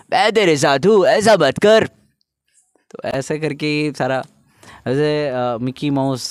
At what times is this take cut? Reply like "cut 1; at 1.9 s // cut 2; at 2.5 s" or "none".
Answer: none